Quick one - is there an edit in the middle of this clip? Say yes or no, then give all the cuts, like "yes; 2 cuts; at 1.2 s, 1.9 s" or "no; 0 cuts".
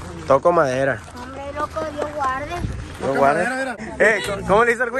yes; 1 cut; at 3.8 s